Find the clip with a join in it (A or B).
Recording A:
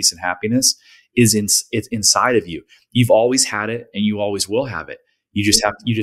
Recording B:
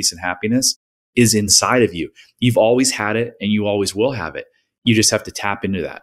B